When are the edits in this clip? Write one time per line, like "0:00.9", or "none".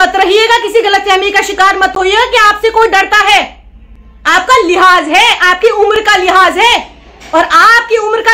none